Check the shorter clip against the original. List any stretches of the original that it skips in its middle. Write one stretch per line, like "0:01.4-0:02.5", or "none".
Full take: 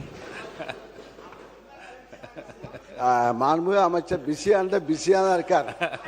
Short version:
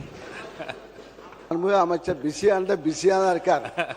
0:01.5-0:03.6